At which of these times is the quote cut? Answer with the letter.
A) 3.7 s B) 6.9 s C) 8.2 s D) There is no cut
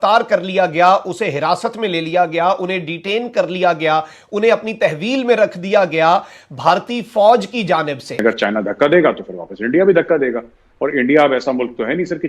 C